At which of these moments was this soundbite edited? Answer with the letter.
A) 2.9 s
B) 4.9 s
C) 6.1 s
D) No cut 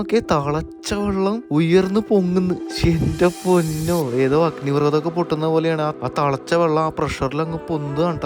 D